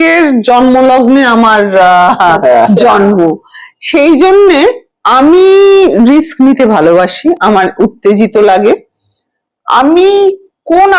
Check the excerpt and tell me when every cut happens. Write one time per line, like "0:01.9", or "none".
none